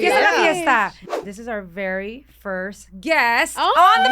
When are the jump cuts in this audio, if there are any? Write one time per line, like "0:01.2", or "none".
0:01.0

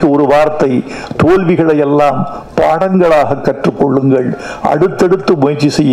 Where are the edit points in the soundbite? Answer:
none

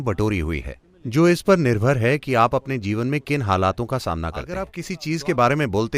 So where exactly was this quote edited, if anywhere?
0:04.8

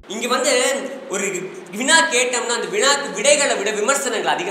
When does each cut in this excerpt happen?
none

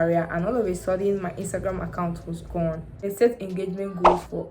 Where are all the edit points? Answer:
0:02.9

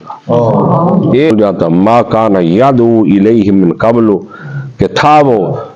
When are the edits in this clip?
0:01.3

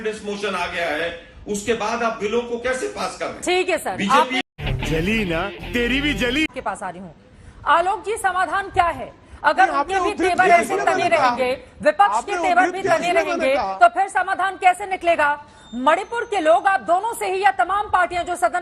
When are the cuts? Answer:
none

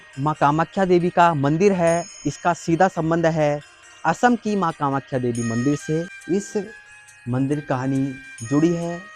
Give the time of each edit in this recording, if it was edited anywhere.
0:06.1

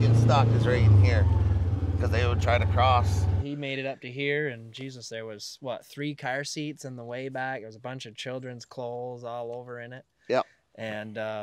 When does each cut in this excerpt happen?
none

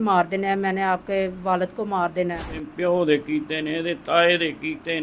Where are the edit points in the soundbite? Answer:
0:02.7

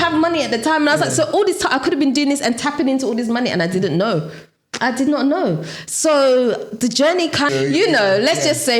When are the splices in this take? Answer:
0:07.5

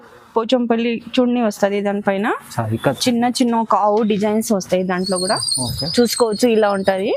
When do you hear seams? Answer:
none

